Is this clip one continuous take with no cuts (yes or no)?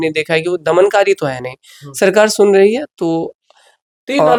yes